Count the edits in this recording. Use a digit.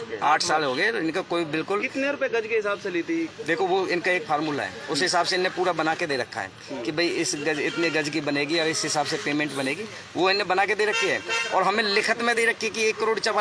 0